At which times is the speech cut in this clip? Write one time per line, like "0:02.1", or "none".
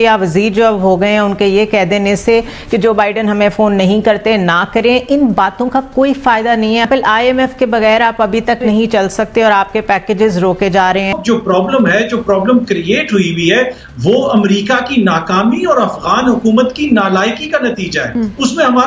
0:06.9
0:11.2